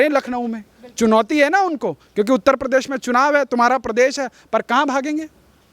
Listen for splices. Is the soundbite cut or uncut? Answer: uncut